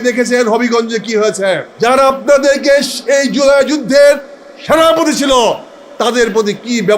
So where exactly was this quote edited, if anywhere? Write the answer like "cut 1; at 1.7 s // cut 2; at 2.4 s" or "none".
cut 1; at 1.7 s